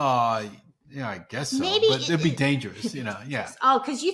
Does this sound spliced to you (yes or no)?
no